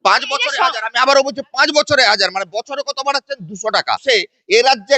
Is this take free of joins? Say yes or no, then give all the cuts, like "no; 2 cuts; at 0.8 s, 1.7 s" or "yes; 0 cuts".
no; 1 cut; at 4.0 s